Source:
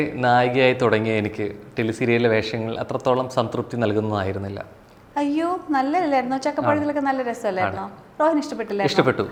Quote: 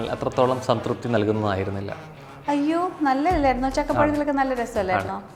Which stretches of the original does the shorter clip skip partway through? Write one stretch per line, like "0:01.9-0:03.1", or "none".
none